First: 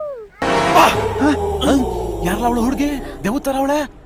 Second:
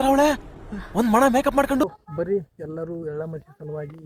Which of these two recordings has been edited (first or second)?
second